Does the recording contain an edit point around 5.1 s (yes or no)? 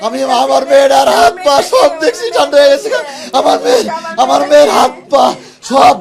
no